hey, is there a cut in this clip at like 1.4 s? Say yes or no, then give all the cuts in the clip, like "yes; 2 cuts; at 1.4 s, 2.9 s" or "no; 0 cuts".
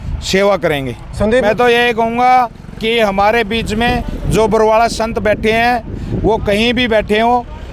yes; 1 cut; at 1.4 s